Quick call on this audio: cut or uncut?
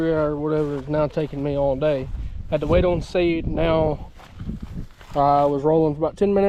uncut